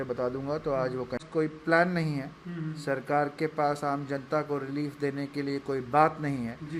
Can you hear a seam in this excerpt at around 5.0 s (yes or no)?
no